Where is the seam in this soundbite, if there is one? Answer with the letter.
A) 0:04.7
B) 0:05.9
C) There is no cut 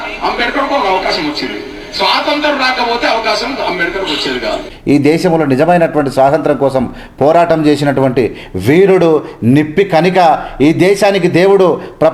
A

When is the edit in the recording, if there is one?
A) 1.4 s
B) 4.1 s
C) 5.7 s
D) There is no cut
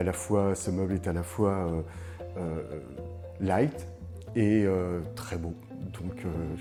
D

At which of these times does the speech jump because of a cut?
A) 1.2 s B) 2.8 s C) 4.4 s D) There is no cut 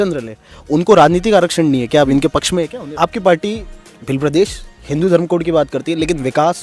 B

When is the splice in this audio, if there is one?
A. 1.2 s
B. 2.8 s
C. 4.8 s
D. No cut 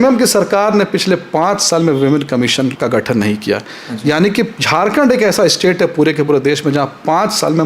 B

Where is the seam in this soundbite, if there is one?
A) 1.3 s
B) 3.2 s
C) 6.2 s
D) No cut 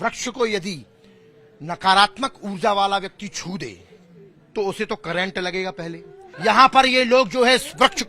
C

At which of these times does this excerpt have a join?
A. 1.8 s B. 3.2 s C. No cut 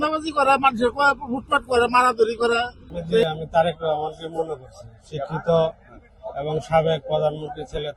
B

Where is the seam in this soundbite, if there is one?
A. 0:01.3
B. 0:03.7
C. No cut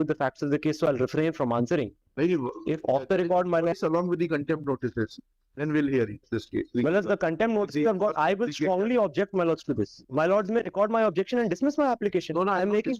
B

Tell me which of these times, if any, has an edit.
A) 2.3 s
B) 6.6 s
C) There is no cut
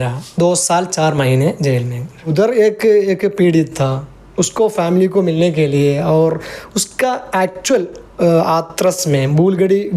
A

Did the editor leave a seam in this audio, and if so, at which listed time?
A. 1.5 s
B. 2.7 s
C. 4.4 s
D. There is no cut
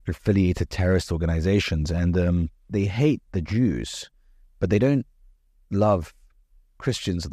B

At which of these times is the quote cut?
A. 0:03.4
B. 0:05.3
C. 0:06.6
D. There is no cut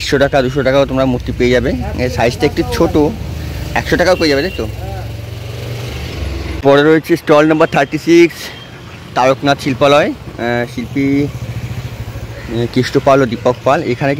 C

